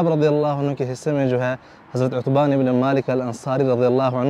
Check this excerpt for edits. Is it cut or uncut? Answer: uncut